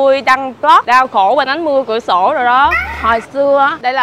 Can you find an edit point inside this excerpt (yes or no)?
yes